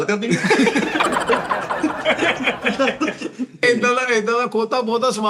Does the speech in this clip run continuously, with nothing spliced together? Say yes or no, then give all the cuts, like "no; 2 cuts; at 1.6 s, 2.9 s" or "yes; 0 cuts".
no; 1 cut; at 3.6 s